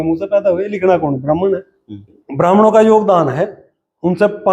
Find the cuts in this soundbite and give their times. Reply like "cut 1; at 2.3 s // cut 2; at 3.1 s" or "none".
cut 1; at 2.2 s